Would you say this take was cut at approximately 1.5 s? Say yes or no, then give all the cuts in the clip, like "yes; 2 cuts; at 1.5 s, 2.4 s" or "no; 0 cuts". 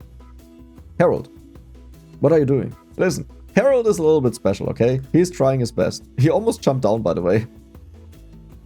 no; 1 cut; at 2.8 s